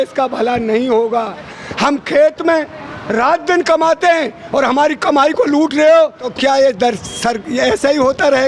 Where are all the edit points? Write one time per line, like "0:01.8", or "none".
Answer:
0:01.6
0:06.2